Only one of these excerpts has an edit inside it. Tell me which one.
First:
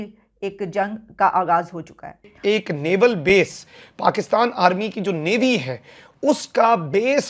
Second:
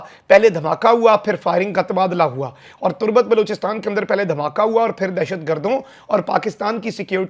first; 1 cut; at 2.3 s

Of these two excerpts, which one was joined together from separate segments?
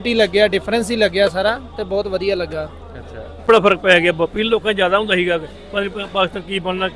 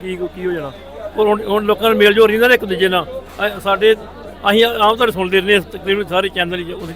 first; 1 cut; at 3.4 s

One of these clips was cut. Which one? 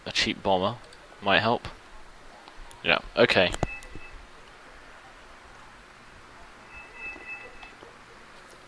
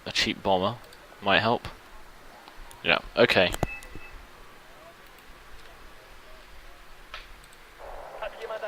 first; 1 cut; at 4.3 s

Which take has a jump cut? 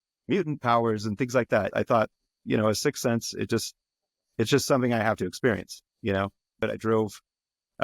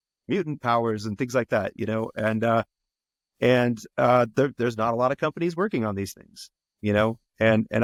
first; 2 cuts; at 1.7 s, 6.6 s

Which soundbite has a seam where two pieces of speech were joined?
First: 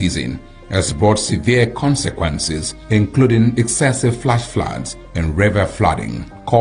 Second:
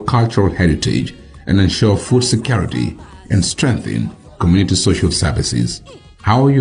first; 1 cut; at 1.1 s

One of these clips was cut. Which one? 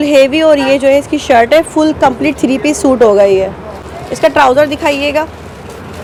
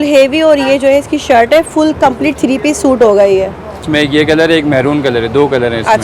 second; 1 cut; at 3.8 s

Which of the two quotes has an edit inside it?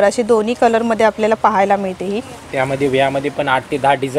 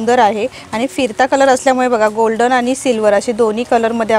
first; 1 cut; at 2.4 s

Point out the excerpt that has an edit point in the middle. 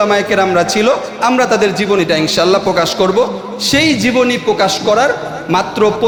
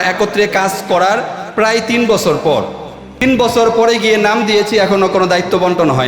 second; 1 cut; at 3.2 s

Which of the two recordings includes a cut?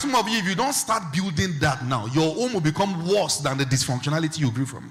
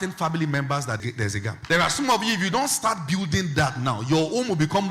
second; 1 cut; at 1.0 s

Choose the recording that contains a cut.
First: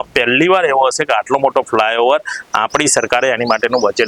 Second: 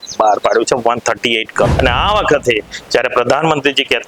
second; 1 cut; at 1.7 s

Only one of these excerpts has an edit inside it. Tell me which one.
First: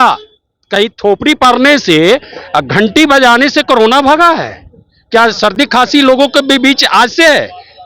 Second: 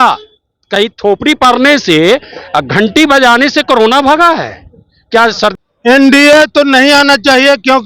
second; 1 cut; at 5.5 s

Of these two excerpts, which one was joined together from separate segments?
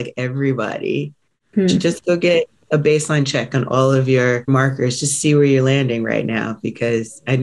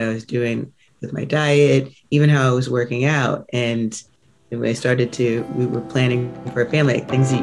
first; 2 cuts; at 1.5 s, 4.5 s

